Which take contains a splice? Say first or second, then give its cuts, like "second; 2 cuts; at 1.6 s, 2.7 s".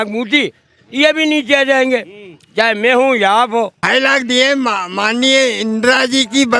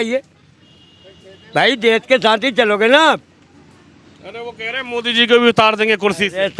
first; 1 cut; at 3.8 s